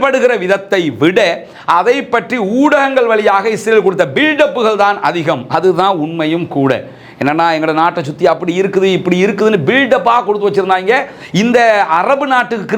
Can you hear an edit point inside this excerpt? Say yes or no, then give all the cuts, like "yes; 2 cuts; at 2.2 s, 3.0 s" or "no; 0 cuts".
no; 0 cuts